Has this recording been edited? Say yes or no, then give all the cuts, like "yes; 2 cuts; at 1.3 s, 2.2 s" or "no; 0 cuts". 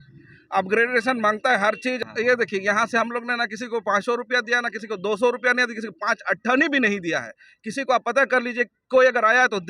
yes; 1 cut; at 2.0 s